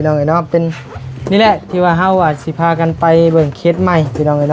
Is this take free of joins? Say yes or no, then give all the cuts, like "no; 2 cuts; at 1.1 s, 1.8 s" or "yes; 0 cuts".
yes; 0 cuts